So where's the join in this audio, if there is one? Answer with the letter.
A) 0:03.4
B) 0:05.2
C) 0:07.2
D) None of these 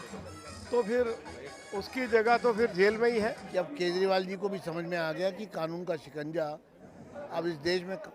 A